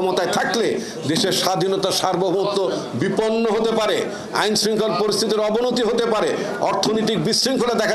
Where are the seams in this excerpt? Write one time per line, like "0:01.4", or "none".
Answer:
none

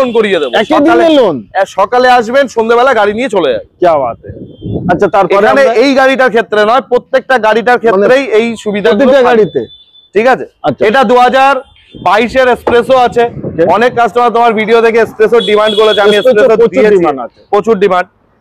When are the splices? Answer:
none

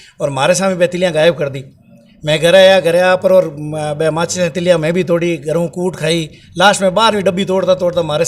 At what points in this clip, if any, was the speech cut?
none

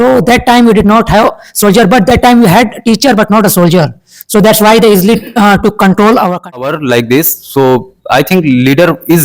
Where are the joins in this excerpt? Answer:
0:06.7

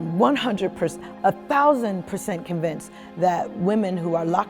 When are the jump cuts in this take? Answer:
none

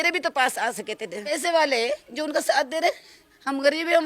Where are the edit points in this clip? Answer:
0:01.2

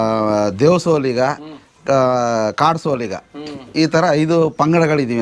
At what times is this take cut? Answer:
none

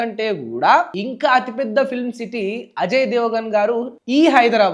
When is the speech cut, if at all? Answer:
none

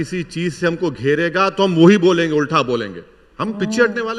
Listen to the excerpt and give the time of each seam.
none

